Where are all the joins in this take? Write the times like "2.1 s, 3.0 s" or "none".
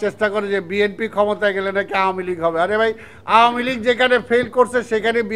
none